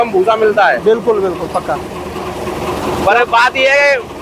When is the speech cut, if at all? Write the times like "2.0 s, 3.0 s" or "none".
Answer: none